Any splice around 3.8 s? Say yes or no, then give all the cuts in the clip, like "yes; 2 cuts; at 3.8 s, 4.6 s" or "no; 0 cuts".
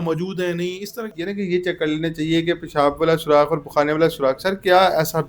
no; 1 cut; at 1.1 s